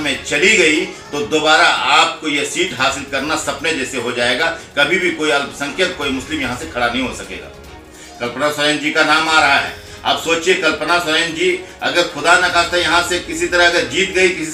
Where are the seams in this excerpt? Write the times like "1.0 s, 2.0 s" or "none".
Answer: none